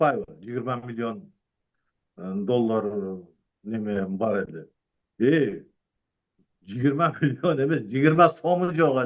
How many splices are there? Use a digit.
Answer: 0